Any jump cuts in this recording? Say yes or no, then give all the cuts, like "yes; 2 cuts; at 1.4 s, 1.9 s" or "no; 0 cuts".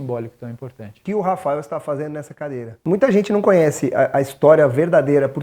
yes; 2 cuts; at 1.0 s, 2.7 s